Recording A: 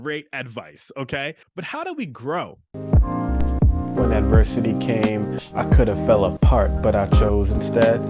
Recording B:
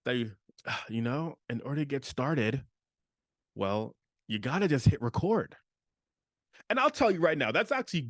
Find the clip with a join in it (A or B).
A